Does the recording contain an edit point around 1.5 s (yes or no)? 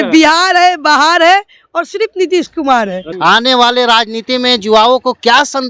no